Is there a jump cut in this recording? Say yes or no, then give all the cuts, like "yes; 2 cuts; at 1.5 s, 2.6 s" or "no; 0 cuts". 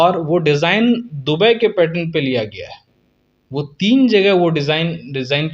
no; 0 cuts